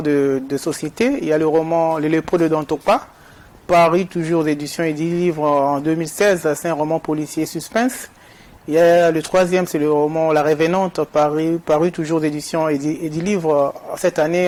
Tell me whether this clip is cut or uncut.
uncut